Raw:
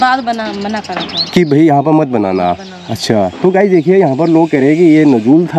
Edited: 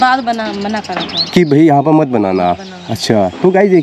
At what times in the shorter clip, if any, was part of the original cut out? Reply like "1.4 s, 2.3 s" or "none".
none